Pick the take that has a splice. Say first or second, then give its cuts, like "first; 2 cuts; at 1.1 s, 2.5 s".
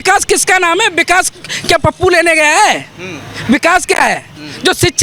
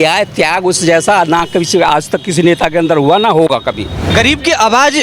second; 1 cut; at 4.1 s